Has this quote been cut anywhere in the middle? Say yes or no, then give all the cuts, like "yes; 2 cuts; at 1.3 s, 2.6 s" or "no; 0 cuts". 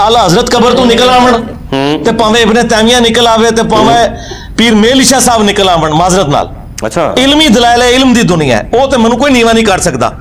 no; 0 cuts